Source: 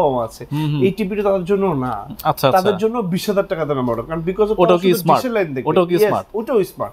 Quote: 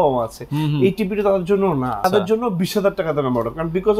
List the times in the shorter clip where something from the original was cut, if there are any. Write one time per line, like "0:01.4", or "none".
0:02.1